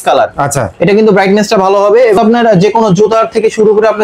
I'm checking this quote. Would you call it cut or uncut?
cut